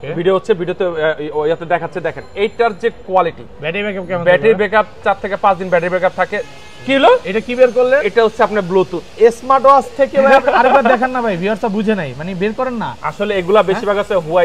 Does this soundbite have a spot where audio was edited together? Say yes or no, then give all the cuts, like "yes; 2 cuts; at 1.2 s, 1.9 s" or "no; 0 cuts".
no; 0 cuts